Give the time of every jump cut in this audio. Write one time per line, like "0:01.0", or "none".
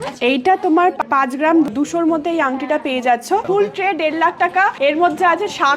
0:03.4